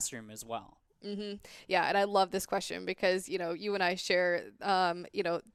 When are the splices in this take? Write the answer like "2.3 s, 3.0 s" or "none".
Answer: none

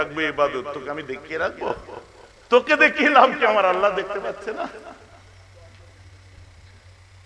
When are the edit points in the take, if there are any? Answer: none

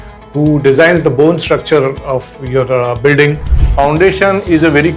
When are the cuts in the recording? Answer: 3.5 s

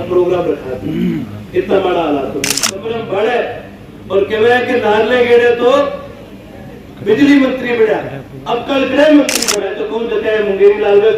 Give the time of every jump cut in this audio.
2.7 s, 9.8 s

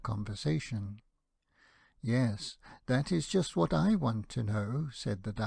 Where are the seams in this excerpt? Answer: 4.5 s

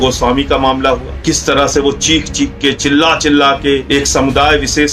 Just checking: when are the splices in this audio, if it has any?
1.1 s, 3.8 s

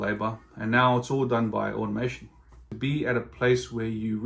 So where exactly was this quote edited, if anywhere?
2.7 s

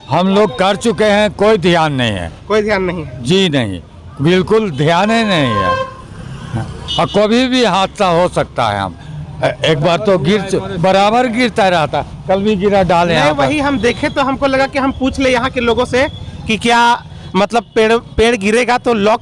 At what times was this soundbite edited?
none

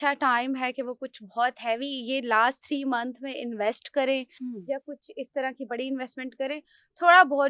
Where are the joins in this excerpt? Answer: none

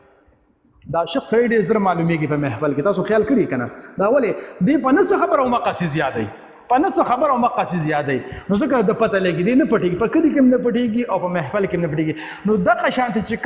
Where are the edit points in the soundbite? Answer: none

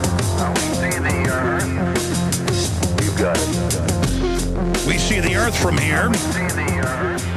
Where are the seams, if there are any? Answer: 6.3 s

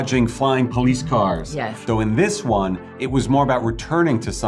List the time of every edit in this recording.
1.8 s

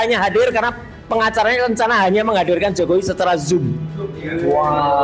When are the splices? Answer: none

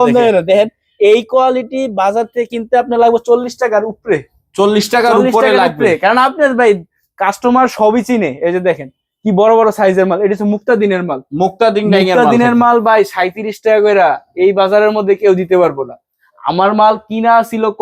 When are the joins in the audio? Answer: none

